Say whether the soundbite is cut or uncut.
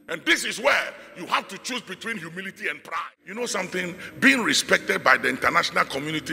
cut